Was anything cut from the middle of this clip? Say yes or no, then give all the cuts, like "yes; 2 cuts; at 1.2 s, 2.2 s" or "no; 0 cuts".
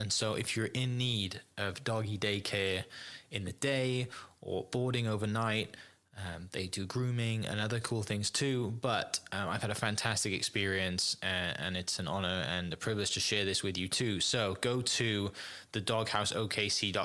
no; 0 cuts